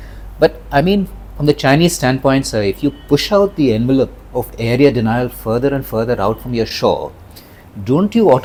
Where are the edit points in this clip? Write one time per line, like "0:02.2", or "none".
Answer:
none